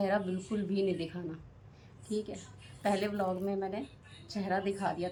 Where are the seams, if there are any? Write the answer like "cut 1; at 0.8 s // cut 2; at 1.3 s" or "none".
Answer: none

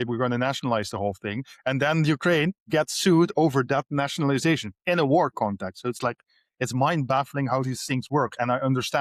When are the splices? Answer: none

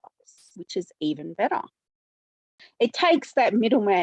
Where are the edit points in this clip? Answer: cut 1; at 2.7 s

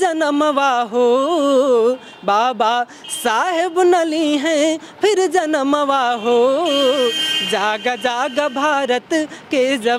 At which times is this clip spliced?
none

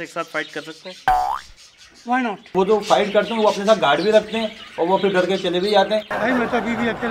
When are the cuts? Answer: cut 1; at 2.5 s // cut 2; at 6.1 s

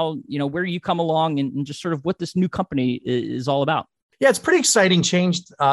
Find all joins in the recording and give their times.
cut 1; at 4.0 s

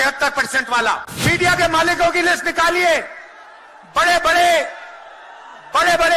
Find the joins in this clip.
cut 1; at 1.1 s

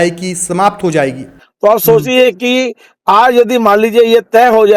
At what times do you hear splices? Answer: cut 1; at 1.3 s

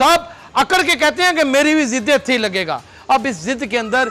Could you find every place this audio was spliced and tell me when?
none

